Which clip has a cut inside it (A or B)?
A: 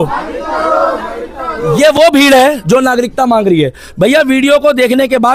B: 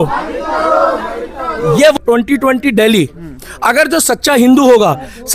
B